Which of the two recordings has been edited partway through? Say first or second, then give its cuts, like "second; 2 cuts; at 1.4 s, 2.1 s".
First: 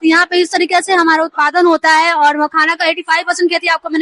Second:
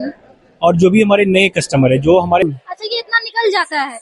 second; 1 cut; at 2.4 s